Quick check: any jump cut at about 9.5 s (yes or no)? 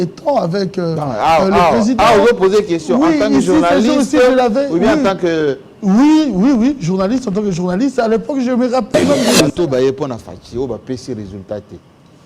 yes